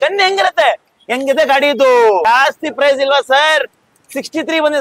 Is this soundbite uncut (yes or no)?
no